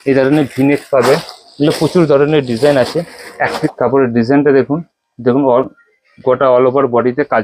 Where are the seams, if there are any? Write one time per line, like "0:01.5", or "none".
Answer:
0:03.7